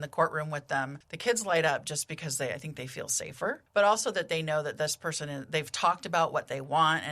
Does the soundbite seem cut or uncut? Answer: cut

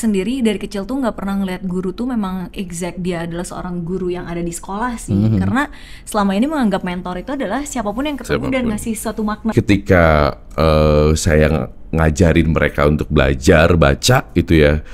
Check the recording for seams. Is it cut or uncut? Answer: cut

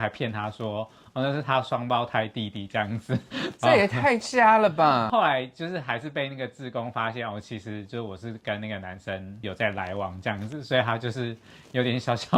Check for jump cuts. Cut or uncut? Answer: uncut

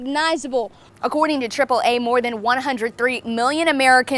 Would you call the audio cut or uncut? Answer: cut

